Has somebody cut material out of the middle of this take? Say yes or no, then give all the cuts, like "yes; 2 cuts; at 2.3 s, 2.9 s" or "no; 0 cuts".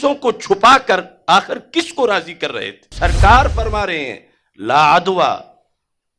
yes; 1 cut; at 2.9 s